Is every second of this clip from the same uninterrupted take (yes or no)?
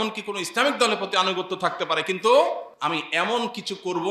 no